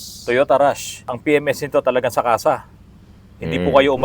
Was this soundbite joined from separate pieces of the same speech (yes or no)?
yes